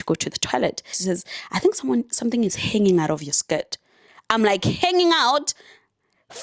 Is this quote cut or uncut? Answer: cut